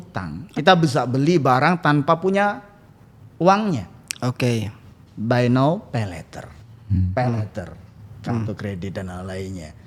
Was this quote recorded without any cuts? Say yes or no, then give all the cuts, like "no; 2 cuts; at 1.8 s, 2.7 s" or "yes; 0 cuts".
yes; 0 cuts